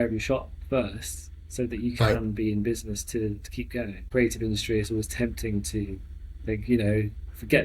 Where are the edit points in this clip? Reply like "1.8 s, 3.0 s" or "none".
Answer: 4.1 s